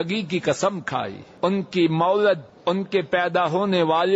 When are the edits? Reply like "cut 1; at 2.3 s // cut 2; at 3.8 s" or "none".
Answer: cut 1; at 1.2 s // cut 2; at 2.5 s